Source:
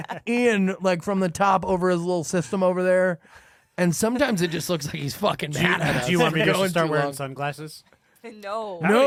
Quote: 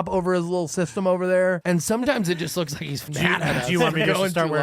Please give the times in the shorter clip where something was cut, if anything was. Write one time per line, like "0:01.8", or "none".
0:01.6
0:03.0